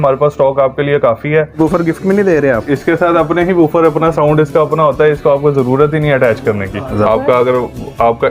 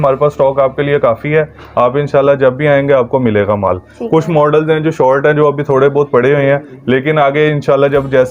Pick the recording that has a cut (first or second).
first